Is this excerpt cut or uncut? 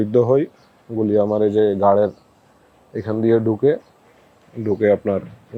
uncut